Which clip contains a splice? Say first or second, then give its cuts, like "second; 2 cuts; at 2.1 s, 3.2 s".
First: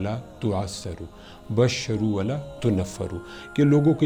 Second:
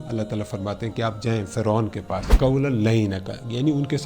second; 1 cut; at 2.3 s